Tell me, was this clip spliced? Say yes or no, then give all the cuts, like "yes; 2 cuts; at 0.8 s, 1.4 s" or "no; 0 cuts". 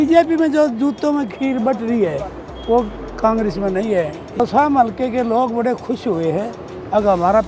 yes; 1 cut; at 4.4 s